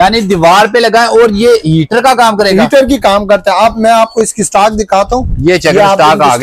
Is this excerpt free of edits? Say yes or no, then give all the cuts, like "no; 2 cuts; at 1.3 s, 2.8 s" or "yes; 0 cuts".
yes; 0 cuts